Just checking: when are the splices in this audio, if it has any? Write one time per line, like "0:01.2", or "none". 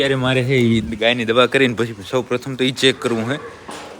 none